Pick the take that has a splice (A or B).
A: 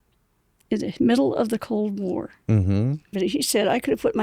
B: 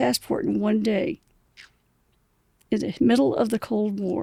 A